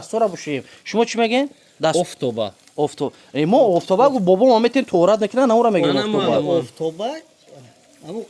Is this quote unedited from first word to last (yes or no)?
yes